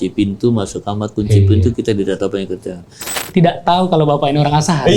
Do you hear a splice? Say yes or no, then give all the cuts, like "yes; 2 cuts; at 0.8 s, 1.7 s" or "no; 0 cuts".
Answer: yes; 1 cut; at 3.2 s